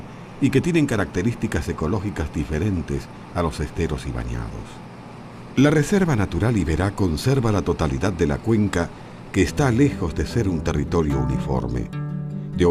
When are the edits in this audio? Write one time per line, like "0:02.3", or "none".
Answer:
none